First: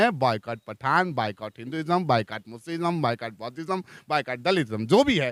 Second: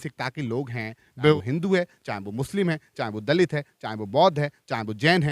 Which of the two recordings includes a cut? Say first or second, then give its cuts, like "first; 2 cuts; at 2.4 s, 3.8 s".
second; 1 cut; at 1.3 s